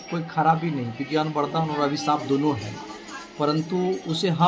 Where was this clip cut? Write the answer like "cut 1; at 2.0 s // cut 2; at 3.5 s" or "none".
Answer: none